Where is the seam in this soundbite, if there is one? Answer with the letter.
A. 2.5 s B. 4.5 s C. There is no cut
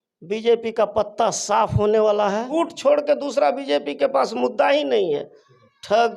A